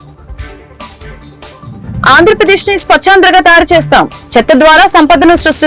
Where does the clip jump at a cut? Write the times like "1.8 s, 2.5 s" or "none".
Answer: none